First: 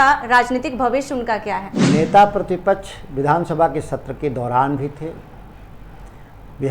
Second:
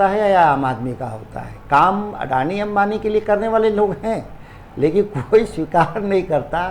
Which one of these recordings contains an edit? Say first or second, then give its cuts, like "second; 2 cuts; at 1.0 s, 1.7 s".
first; 1 cut; at 1.7 s